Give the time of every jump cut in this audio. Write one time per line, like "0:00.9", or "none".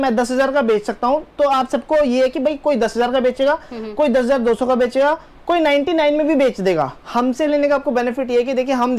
0:07.0